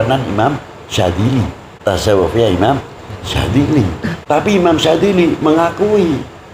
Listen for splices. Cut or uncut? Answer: cut